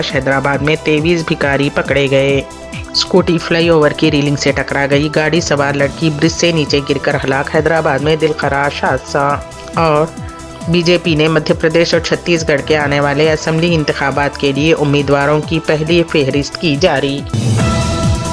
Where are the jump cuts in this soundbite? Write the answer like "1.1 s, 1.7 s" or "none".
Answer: 17.4 s